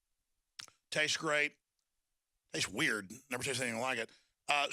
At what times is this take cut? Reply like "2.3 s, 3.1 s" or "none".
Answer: 3.1 s